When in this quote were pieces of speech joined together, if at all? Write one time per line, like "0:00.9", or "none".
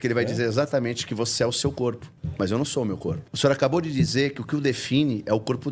none